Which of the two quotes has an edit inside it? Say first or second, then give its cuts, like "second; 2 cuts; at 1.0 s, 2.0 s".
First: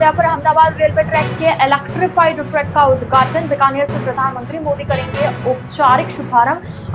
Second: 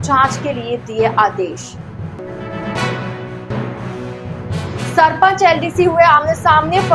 second; 1 cut; at 4.9 s